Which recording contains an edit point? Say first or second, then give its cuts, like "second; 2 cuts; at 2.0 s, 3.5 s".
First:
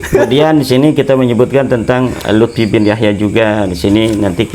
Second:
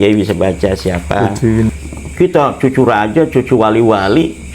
second; 1 cut; at 1.7 s